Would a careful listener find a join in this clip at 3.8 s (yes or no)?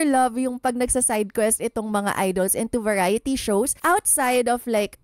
yes